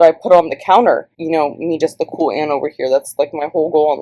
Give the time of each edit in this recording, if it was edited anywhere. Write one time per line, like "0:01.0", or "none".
0:01.1

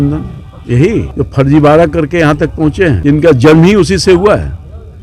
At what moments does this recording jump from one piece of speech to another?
0:01.1
0:03.0

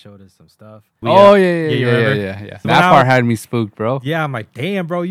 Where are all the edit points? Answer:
0:01.0
0:02.6

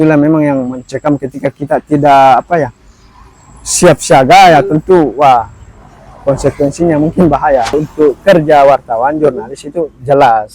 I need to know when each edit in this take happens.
0:07.7

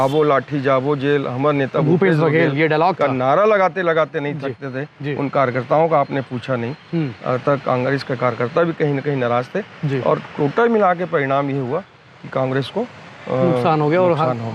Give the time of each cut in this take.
none

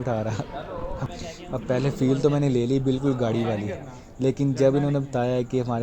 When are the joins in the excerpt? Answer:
0:01.1

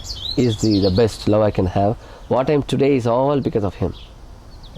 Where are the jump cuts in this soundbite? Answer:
0:02.1

